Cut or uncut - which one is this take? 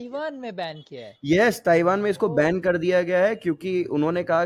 uncut